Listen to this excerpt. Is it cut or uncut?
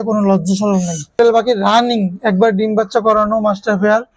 cut